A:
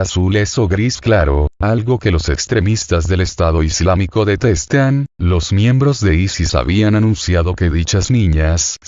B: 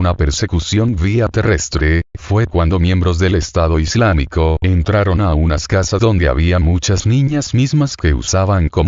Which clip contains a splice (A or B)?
B